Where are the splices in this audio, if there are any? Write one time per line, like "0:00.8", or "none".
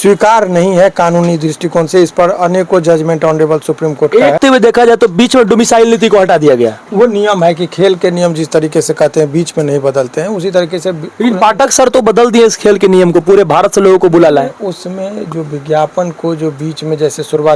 0:04.4